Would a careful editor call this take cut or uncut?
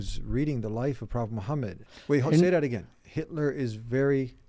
cut